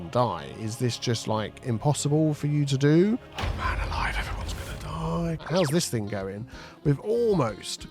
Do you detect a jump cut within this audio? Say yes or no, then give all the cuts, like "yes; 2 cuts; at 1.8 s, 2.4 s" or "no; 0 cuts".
yes; 1 cut; at 5.4 s